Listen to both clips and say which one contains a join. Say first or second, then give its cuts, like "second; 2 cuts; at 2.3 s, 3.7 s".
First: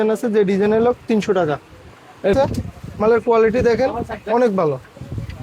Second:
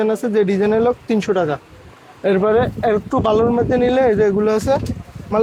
first; 1 cut; at 2.3 s